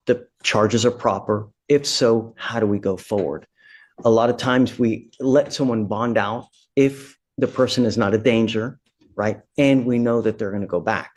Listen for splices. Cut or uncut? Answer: uncut